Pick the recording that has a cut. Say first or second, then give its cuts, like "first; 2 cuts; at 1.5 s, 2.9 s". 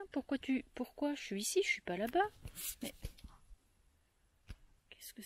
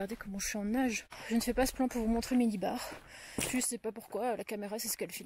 second; 1 cut; at 1.1 s